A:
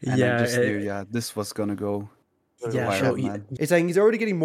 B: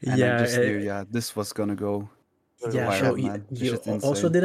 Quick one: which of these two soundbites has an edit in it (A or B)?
A